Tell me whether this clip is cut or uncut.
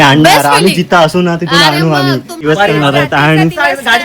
cut